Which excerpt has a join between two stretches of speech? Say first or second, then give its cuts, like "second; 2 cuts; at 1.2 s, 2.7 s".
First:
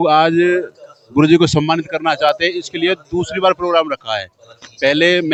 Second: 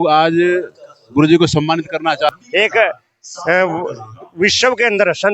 second; 1 cut; at 2.3 s